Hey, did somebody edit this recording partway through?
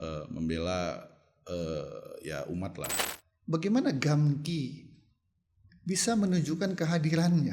yes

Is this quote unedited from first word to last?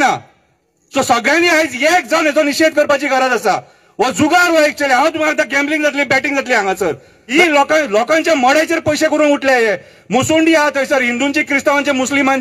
no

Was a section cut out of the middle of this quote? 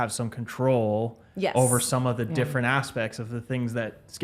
no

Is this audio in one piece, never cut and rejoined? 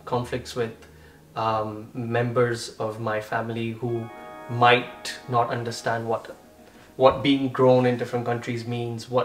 yes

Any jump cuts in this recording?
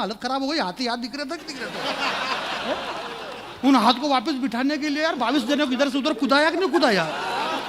no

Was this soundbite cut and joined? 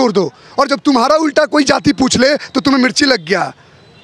no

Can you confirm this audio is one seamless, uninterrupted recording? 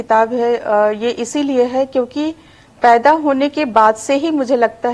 yes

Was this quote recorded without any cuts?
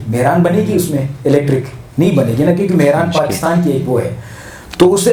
yes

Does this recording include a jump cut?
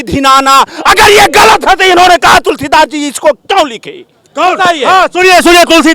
no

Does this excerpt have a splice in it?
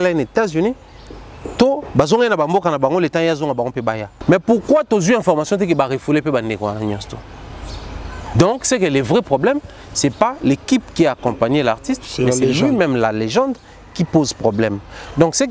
yes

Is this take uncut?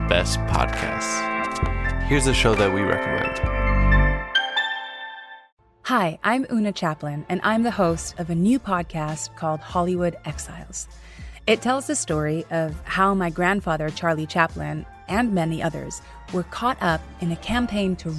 yes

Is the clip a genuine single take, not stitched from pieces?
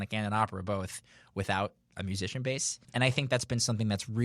no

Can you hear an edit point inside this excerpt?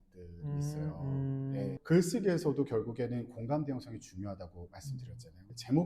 yes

